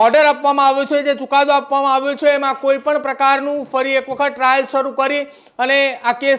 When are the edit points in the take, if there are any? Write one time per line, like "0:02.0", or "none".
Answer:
none